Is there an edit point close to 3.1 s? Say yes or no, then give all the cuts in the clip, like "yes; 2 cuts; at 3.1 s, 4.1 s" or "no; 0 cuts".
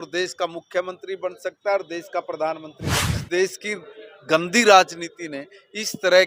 yes; 1 cut; at 3.1 s